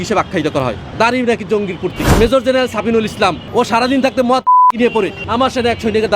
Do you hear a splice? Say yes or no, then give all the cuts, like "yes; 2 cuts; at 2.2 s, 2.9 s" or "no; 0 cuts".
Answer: yes; 4 cuts; at 0.8 s, 2.0 s, 3.4 s, 5.2 s